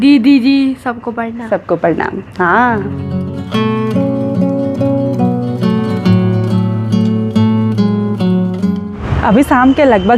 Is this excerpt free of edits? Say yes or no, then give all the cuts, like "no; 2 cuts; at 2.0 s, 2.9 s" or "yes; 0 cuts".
yes; 0 cuts